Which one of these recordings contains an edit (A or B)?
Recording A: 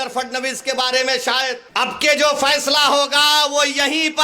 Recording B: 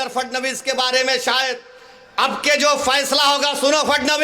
A